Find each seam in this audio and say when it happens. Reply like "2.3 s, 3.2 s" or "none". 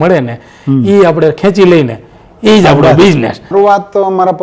3.5 s